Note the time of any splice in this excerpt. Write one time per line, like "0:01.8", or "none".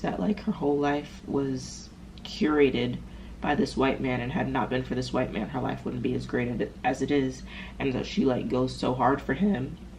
none